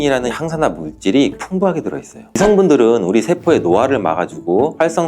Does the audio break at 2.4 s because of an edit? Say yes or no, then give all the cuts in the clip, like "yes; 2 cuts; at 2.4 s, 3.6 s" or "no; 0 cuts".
yes; 1 cut; at 2.4 s